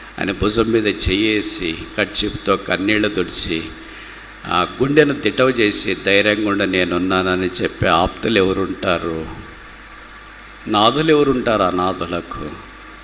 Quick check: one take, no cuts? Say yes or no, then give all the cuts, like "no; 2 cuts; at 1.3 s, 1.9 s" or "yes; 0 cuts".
yes; 0 cuts